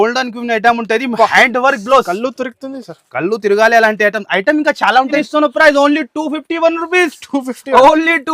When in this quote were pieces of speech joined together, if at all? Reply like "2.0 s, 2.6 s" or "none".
5.2 s